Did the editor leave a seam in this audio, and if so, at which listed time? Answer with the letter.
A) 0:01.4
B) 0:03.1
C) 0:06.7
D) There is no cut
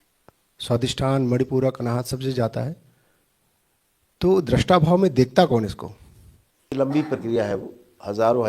C